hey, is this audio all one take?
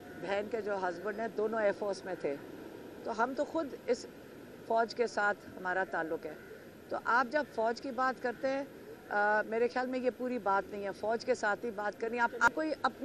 yes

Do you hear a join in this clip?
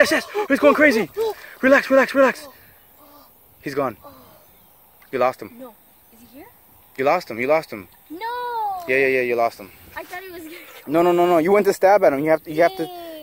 no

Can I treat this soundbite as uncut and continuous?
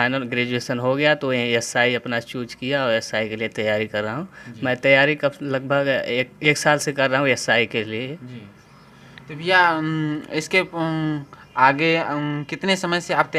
yes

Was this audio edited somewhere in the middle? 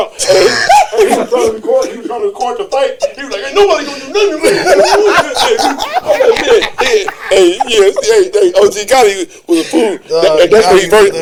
no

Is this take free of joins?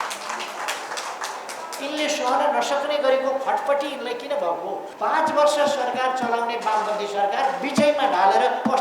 no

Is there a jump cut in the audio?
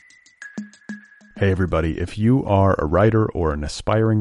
yes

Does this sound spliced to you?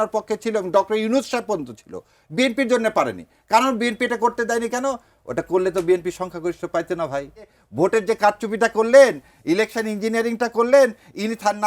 yes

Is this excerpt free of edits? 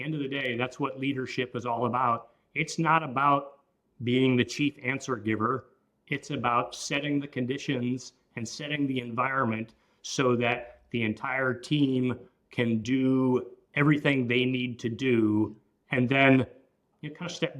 yes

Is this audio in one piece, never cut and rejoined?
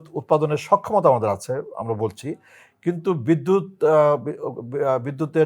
yes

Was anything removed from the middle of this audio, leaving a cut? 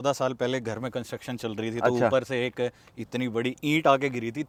no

